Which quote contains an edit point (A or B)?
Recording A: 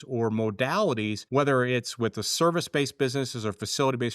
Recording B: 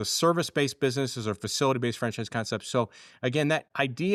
A